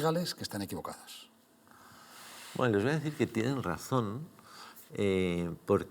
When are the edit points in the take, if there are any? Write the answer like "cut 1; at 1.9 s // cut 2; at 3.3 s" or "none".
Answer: none